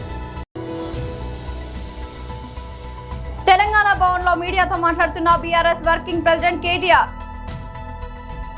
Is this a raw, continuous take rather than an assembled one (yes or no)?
yes